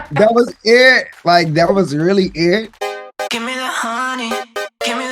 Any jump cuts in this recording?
yes; 1 cut; at 2.7 s

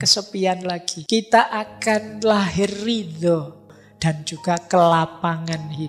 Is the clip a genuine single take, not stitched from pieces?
no; 2 cuts; at 0.9 s, 3.6 s

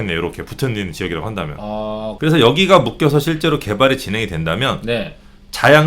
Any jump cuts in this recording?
yes; 1 cut; at 2.1 s

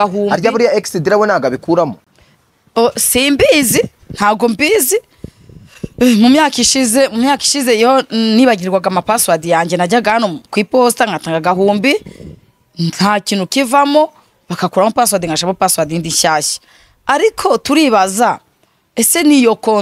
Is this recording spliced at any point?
no; 0 cuts

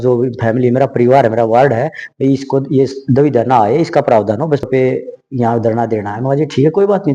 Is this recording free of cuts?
no; 1 cut; at 4.6 s

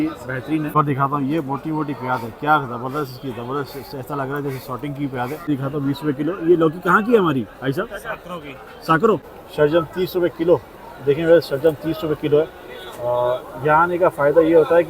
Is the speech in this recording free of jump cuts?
no; 3 cuts; at 0.7 s, 5.5 s, 9.4 s

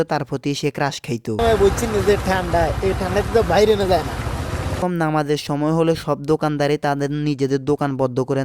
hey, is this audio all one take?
no; 2 cuts; at 1.4 s, 4.8 s

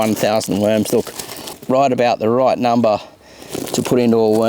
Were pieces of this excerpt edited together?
yes; 1 cut; at 1.5 s

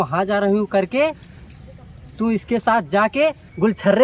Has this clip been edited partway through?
no; 0 cuts

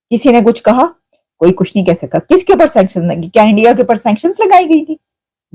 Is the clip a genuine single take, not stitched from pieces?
yes; 0 cuts

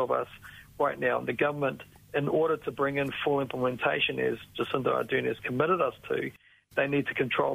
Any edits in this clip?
no; 0 cuts

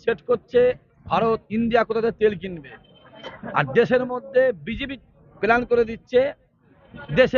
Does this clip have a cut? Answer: no; 0 cuts

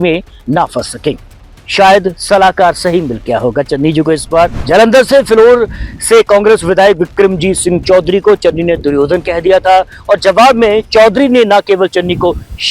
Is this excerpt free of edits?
no; 1 cut; at 4.6 s

